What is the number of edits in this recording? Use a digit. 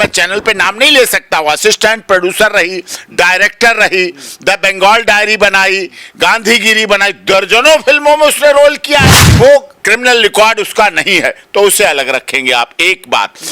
1